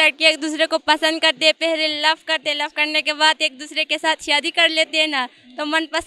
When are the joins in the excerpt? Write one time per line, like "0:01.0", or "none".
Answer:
none